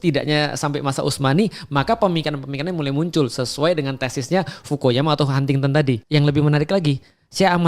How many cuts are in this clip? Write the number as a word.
one